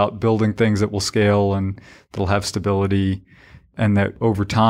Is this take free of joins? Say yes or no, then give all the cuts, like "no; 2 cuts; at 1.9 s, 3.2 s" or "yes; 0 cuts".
yes; 0 cuts